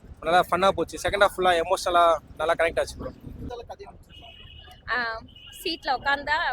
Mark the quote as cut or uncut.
cut